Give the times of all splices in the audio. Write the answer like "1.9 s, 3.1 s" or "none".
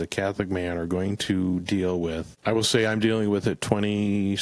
2.3 s